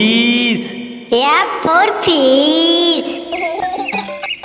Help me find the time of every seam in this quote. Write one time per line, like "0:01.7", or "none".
0:03.1